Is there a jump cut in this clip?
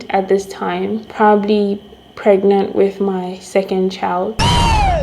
no; 0 cuts

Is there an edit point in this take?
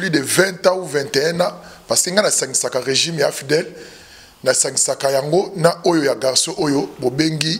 no; 0 cuts

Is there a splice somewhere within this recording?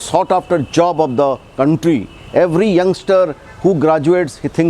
no; 0 cuts

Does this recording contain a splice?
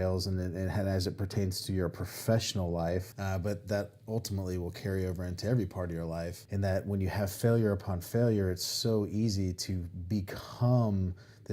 yes; 2 cuts; at 3.1 s, 6.4 s

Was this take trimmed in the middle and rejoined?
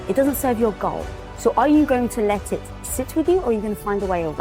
no; 0 cuts

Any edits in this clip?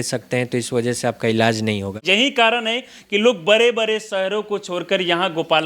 yes; 1 cut; at 2.0 s

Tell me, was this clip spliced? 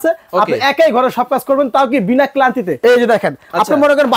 yes; 1 cut; at 2.8 s

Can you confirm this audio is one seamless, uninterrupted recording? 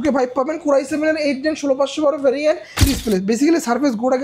no; 1 cut; at 2.8 s

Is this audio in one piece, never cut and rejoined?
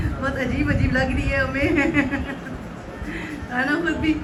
yes; 0 cuts

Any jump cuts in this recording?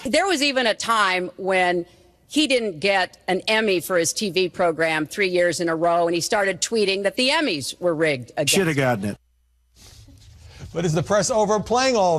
yes; 1 cut; at 5.3 s

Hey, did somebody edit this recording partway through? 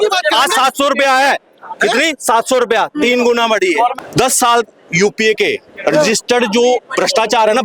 yes; 1 cut; at 4.0 s

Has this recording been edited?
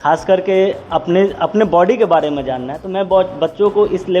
no; 0 cuts

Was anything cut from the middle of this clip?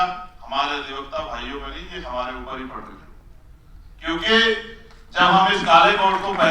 no; 0 cuts

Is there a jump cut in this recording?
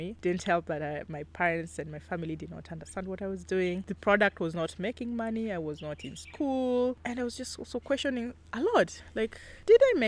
no; 0 cuts

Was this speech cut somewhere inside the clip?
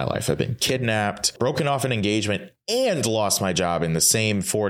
yes; 1 cut; at 1.3 s

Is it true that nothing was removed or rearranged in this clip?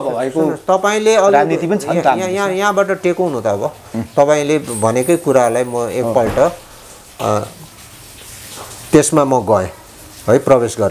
yes; 0 cuts

